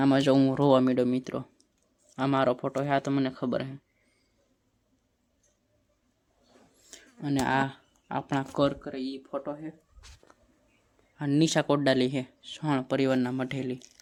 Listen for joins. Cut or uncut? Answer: uncut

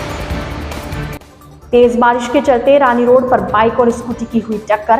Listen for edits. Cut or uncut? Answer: cut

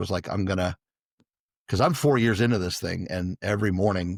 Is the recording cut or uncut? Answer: uncut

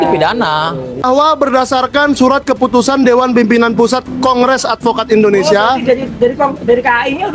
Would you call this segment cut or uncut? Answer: cut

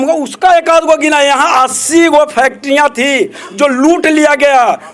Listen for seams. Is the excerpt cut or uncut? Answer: uncut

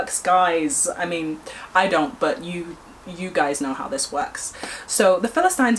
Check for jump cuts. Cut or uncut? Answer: uncut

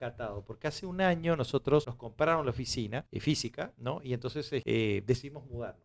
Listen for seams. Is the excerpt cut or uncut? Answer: cut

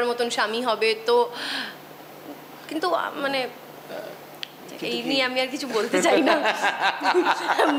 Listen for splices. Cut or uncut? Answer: uncut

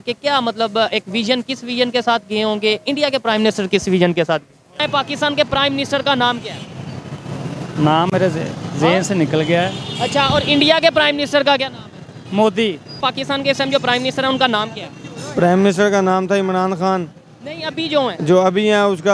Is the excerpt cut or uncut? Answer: cut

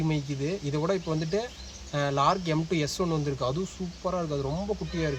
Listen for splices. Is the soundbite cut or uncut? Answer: uncut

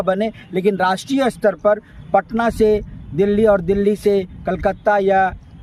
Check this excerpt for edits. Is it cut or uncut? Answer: uncut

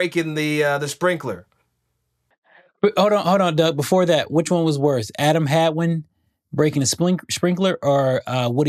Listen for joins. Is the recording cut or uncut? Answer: cut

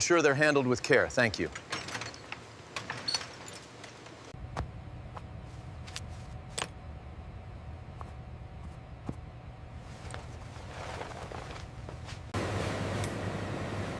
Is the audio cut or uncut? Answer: uncut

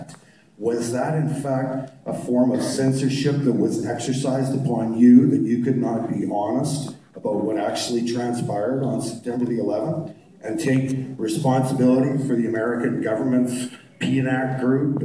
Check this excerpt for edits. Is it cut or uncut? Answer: cut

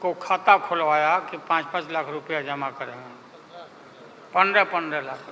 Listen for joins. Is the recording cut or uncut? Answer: uncut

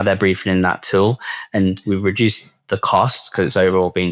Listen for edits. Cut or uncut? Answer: cut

